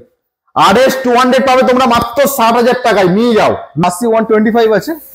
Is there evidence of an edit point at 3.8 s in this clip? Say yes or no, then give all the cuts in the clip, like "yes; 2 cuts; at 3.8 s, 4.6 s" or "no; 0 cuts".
yes; 1 cut; at 3.8 s